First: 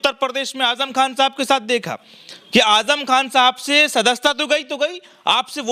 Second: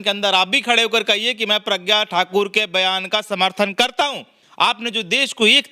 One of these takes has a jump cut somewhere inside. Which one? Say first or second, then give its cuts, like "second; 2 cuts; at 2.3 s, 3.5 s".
second; 1 cut; at 4.4 s